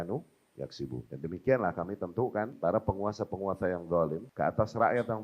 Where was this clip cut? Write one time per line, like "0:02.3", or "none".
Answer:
0:01.1
0:02.5
0:04.3